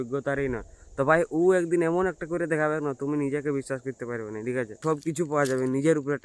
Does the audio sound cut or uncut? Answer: cut